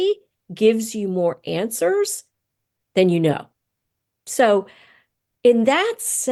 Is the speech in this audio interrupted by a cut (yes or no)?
no